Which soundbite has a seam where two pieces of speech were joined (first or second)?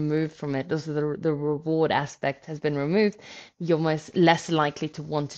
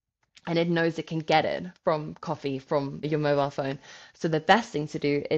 second